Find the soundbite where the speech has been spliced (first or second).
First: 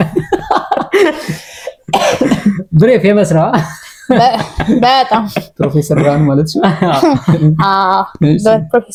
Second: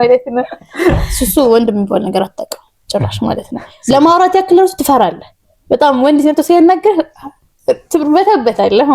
second